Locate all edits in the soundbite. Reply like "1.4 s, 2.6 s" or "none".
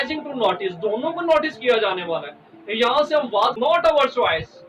3.5 s